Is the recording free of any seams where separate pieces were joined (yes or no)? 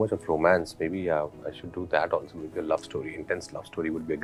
yes